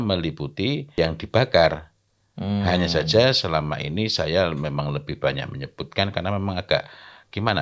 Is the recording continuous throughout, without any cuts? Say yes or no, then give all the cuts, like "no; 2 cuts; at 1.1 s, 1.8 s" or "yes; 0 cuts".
no; 1 cut; at 0.9 s